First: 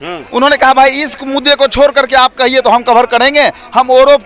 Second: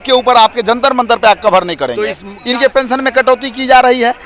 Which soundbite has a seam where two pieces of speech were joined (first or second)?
second